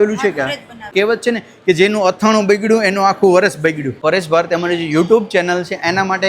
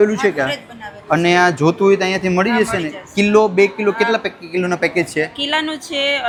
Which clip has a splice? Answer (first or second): first